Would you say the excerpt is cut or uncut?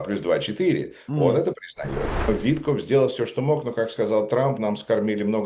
cut